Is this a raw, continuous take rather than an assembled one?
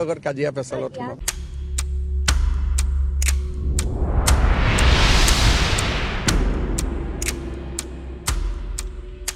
yes; 0 cuts

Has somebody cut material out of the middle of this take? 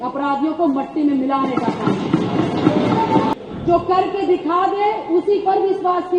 yes; 1 cut; at 3.3 s

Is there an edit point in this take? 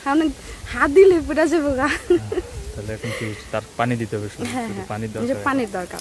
no; 0 cuts

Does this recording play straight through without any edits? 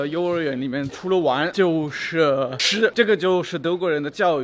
no; 2 cuts; at 1.2 s, 2.9 s

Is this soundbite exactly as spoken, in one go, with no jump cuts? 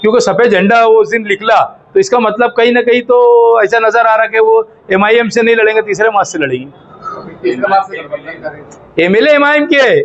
yes; 0 cuts

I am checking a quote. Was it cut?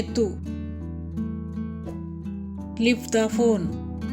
yes; 2 cuts; at 1.0 s, 2.7 s

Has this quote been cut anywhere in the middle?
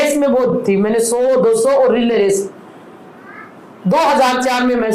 no; 0 cuts

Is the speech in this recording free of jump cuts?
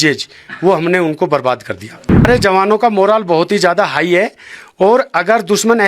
no; 1 cut; at 2.2 s

